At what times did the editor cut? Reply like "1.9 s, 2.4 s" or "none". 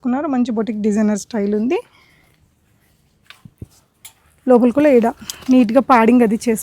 none